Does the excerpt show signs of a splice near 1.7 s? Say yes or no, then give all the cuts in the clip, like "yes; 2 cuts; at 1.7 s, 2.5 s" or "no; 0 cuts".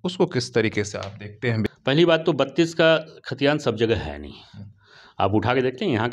yes; 1 cut; at 1.7 s